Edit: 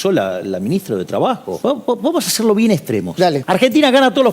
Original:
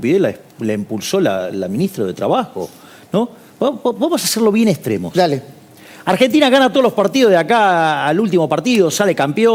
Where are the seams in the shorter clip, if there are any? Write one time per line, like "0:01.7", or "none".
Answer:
0:01.5
0:03.4